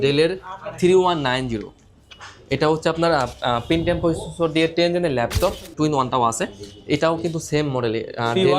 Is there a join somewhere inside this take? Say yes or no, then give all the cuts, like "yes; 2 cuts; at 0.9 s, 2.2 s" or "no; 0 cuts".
yes; 1 cut; at 5.7 s